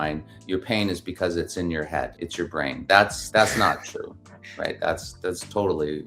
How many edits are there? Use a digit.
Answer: 2